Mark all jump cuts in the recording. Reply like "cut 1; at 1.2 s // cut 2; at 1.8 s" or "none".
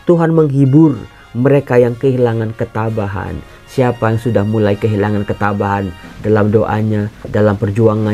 none